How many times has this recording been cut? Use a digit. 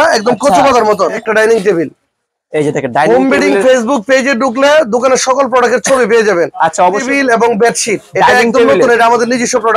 2